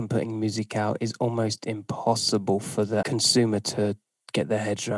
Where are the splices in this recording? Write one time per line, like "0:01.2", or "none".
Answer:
0:03.1